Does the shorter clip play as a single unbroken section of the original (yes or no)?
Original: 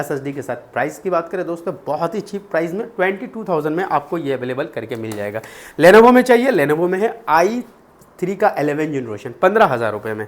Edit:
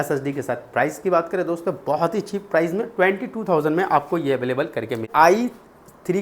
no